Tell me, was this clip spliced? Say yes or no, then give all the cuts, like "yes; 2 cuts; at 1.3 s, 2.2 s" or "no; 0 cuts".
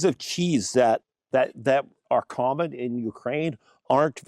yes; 1 cut; at 1.1 s